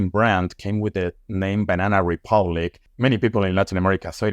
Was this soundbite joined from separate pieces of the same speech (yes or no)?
yes